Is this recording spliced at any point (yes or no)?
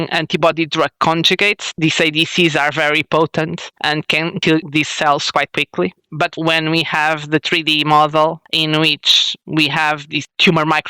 yes